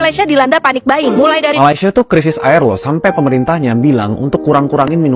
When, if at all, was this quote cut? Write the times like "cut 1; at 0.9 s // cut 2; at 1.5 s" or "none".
cut 1; at 1.5 s